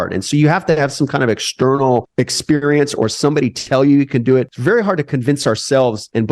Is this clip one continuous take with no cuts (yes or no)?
no